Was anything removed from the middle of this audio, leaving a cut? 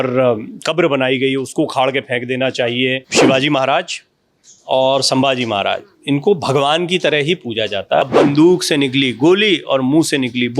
yes; 2 cuts; at 3.1 s, 8.0 s

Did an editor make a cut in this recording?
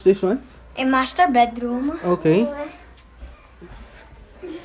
yes; 1 cut; at 3.4 s

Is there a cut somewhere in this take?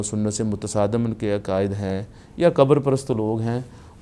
no; 0 cuts

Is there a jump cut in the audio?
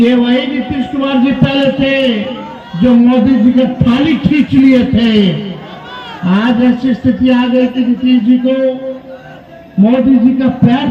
no; 0 cuts

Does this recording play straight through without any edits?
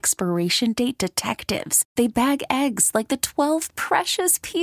yes; 0 cuts

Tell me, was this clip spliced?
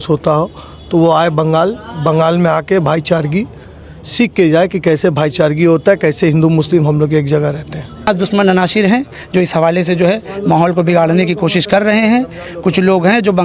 yes; 1 cut; at 8.1 s

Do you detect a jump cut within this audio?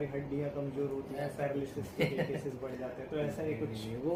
no; 0 cuts

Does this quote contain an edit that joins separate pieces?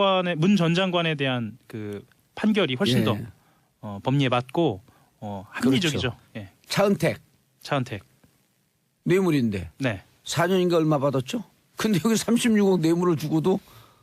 yes; 1 cut; at 3.2 s

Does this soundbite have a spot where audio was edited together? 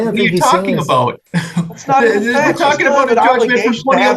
yes; 1 cut; at 1.2 s

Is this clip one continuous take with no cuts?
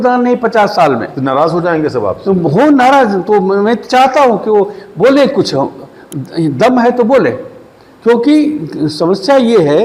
yes; 0 cuts

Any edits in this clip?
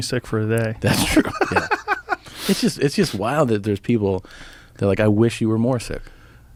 no; 0 cuts

